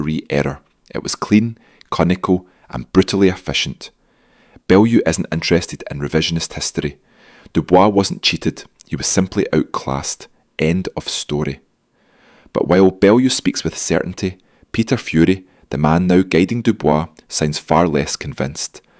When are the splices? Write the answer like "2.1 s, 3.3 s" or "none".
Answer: 2.2 s